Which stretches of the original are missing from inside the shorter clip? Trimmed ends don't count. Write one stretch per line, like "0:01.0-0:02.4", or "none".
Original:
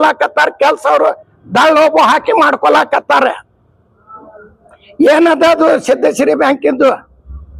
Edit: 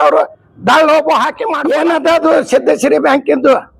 0:02.4-0:04.8